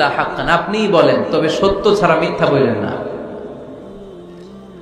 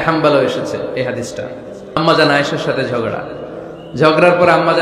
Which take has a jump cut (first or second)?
second